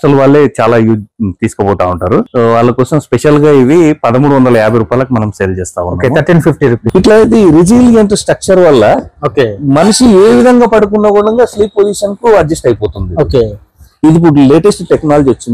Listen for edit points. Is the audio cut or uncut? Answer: cut